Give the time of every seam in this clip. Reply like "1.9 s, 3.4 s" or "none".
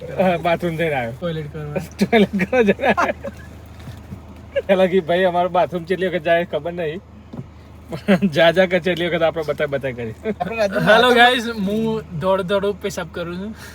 1.1 s, 4.7 s, 10.4 s